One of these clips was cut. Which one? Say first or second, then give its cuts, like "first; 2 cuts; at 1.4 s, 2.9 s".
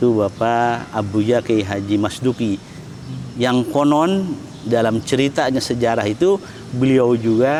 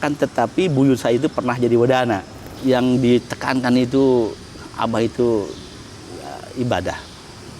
second; 1 cut; at 2.5 s